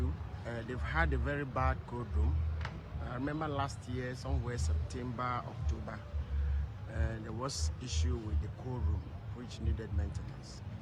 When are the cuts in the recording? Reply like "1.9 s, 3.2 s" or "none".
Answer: none